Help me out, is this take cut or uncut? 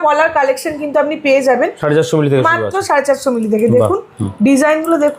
uncut